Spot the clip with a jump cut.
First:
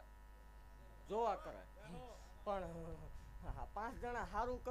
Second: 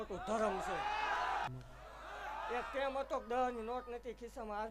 second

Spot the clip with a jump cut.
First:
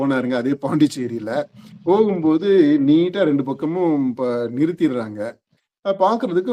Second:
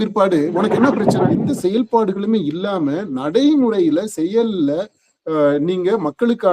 second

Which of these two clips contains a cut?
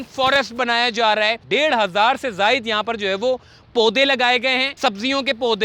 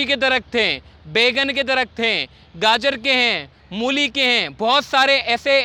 first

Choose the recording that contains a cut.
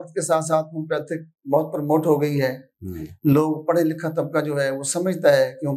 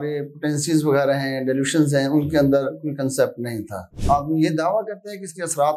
second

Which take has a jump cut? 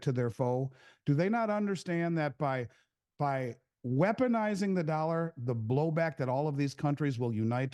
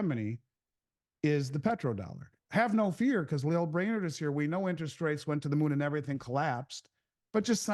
second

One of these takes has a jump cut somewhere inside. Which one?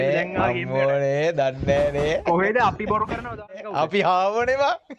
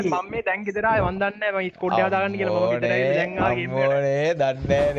first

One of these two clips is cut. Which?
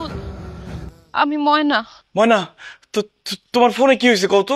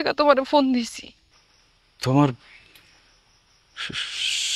first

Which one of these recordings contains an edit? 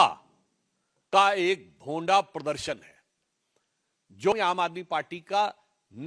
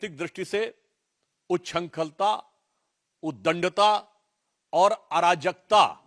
first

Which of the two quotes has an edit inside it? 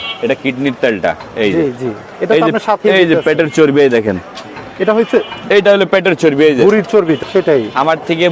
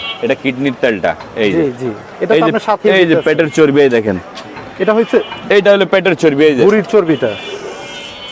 first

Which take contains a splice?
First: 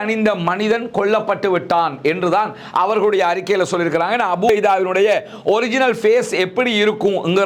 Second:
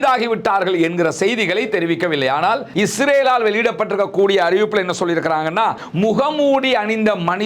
second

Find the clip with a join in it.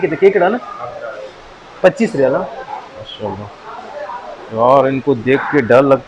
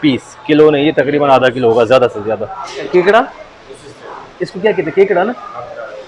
second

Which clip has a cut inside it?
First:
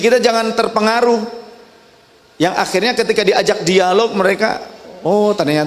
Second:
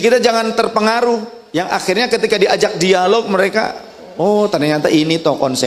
second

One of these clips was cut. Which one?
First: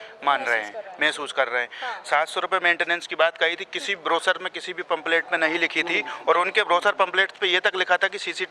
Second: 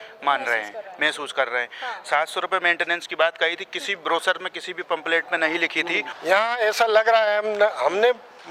second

